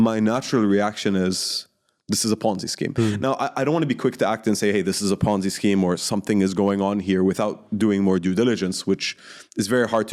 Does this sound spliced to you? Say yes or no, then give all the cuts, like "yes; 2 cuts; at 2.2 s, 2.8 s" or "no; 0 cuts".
no; 0 cuts